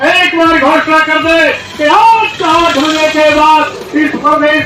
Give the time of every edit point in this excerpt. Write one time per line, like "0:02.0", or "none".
none